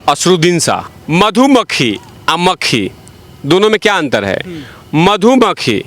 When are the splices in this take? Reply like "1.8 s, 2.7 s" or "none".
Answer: 0.9 s